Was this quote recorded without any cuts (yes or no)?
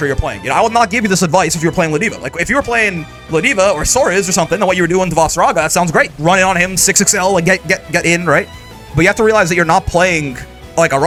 yes